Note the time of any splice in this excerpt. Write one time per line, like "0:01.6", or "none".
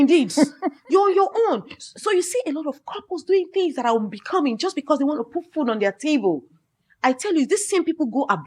none